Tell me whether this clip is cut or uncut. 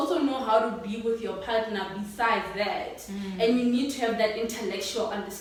uncut